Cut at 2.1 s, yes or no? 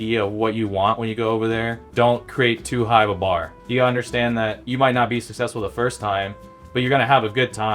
yes